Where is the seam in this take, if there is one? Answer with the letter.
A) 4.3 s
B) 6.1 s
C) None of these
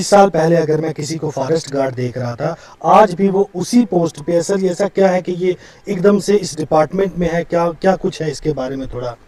C